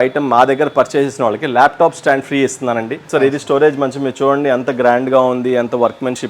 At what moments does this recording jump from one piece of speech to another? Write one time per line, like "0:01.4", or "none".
0:02.9